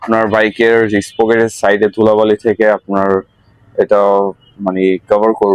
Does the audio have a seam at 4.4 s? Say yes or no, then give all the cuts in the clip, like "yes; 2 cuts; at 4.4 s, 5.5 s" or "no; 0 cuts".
no; 0 cuts